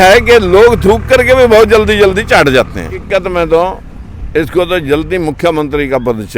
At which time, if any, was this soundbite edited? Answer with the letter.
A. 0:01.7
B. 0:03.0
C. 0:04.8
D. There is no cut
B